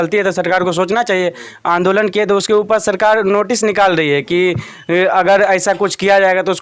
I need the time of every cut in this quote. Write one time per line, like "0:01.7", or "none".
none